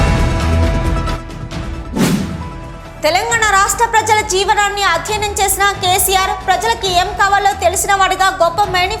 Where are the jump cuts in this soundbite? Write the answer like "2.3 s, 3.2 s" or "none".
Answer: 1.2 s